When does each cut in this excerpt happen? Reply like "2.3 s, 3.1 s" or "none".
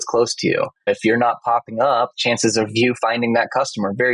0.8 s, 2.2 s